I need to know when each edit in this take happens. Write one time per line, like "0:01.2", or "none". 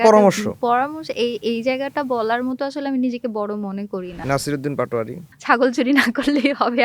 0:04.2
0:05.3